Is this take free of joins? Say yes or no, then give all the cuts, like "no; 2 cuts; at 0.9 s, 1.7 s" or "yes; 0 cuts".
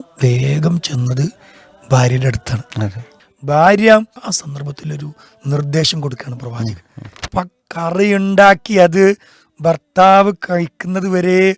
no; 3 cuts; at 3.1 s, 4.2 s, 7.2 s